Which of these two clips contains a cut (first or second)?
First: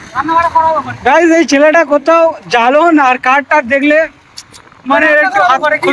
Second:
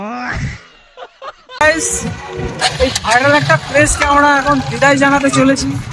second